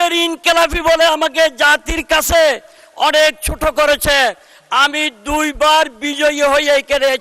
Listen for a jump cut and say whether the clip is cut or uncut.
uncut